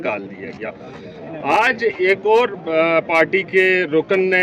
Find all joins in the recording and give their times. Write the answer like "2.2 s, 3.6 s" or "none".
none